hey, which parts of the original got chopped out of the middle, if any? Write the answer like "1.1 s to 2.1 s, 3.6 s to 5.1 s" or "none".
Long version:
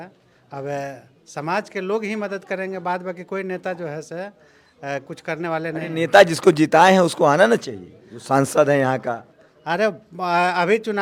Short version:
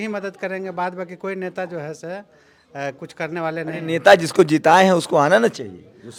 none